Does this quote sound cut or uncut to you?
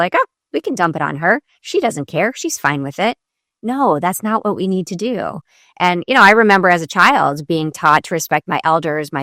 uncut